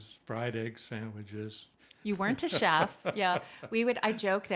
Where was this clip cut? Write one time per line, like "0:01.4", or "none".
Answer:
none